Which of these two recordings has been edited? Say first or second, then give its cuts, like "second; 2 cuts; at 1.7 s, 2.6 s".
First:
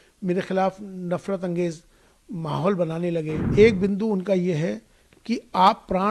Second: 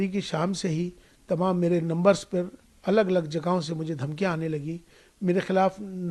first; 1 cut; at 3.4 s